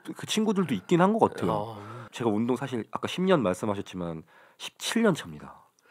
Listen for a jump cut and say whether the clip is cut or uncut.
cut